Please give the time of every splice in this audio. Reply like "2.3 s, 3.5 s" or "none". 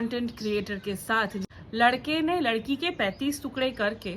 1.5 s